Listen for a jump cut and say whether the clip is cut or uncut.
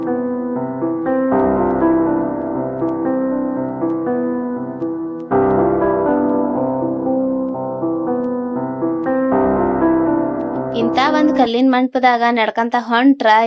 uncut